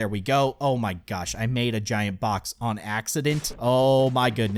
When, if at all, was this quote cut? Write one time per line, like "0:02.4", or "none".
none